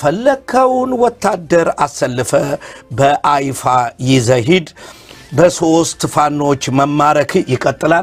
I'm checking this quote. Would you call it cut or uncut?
uncut